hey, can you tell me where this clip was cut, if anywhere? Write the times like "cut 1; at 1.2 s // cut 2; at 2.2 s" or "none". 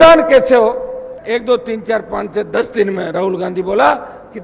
cut 1; at 1.1 s